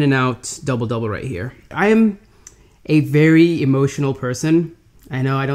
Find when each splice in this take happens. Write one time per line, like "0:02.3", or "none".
0:01.7